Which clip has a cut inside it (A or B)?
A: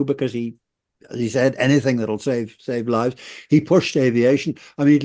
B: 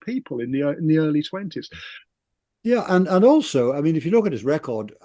B